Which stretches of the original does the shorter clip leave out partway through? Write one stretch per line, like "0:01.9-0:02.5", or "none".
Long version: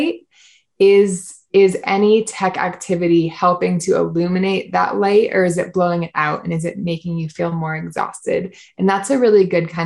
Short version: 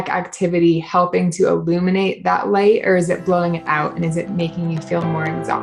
none